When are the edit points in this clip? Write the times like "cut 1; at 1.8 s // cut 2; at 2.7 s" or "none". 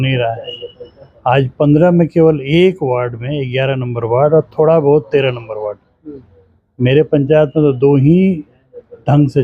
none